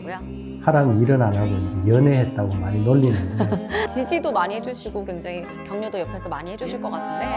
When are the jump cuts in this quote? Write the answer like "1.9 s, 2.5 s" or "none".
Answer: 3.8 s